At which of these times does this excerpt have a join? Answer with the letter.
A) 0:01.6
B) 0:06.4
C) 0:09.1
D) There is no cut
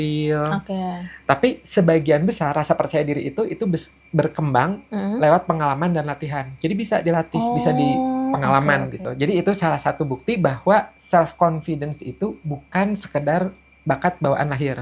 C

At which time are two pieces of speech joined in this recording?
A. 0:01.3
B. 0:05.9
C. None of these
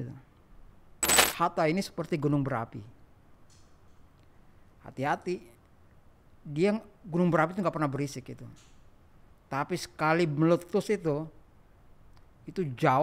A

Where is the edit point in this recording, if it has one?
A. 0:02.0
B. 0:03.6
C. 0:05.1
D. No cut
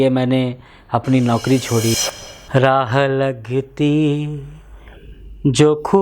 A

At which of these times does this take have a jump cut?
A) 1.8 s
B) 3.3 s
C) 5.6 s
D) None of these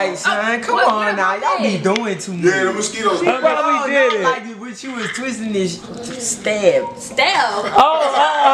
B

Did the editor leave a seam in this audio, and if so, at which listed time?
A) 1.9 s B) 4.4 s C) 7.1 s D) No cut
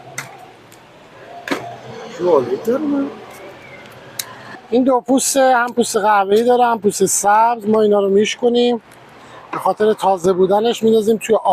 B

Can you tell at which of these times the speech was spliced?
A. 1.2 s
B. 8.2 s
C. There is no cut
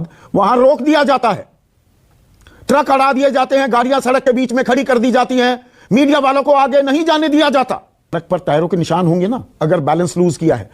B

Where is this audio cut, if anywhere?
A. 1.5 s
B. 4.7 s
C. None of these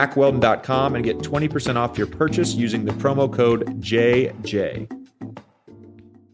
B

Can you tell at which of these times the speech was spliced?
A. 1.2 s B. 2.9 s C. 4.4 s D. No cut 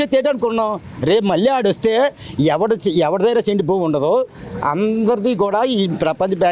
D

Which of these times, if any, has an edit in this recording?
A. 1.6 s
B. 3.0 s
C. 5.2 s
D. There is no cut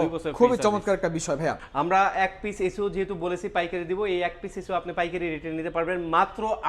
A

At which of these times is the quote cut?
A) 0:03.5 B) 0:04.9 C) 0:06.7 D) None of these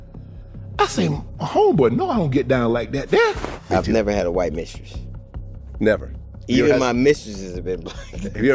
A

